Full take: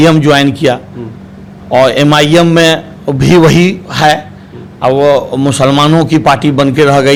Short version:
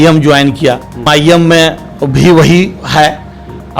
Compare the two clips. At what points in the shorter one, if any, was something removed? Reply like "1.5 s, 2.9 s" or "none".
1.1 s

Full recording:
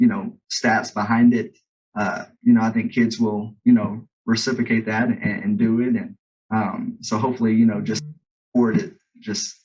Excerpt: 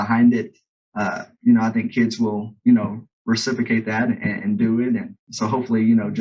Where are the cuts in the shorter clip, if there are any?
5.2 s

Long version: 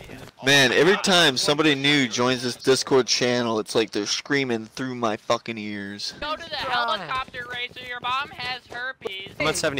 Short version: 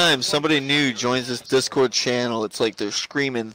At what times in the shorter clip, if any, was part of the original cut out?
none

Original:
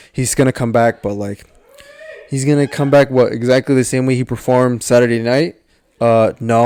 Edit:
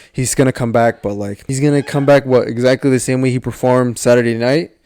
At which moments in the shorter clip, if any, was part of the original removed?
1.4 s

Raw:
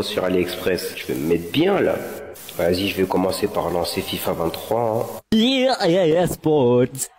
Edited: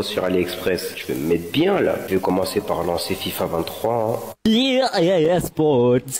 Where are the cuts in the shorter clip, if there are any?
2.1 s

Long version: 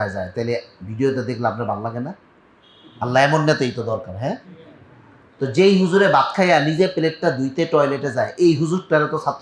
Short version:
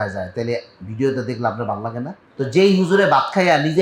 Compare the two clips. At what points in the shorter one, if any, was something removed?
2.2 s

